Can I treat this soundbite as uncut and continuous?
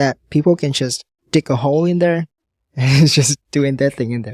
yes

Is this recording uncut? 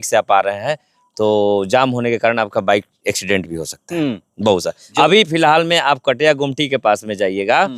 yes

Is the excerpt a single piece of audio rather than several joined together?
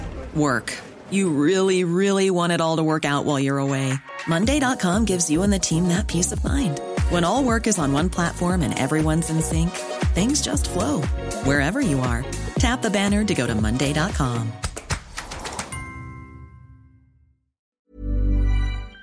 no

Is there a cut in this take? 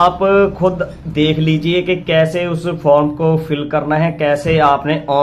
no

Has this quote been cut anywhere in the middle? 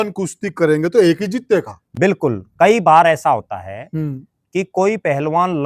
no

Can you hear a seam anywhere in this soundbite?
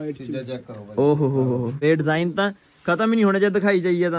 yes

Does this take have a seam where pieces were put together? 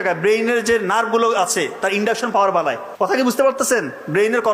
yes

